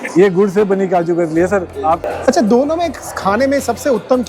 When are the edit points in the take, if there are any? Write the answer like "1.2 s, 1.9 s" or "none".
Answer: 2.0 s